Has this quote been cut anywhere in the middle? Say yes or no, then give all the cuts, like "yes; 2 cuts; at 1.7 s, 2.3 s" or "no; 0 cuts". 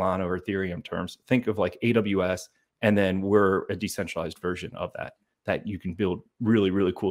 no; 0 cuts